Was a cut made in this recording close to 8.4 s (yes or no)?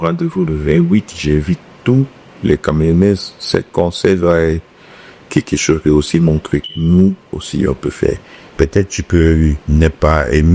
no